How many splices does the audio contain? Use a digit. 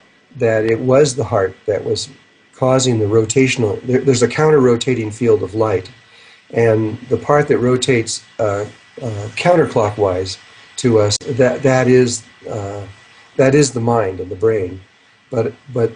1